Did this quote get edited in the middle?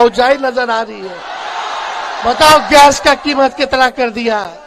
no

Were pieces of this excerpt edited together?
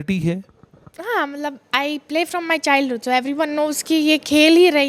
no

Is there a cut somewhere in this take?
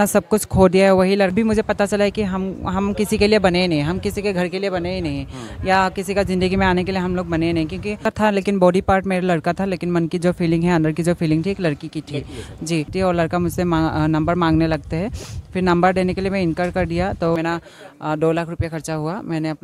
yes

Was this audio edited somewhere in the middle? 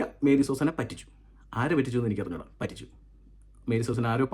no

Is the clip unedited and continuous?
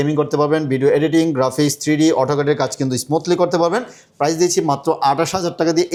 yes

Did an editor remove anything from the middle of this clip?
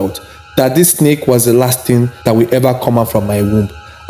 yes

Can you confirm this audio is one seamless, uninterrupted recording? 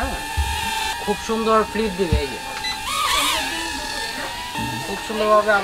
no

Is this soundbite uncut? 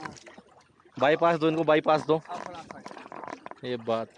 yes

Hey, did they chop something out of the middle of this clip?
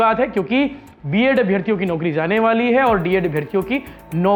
no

